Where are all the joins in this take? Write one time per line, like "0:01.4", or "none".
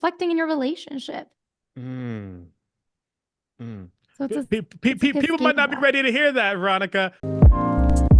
0:07.2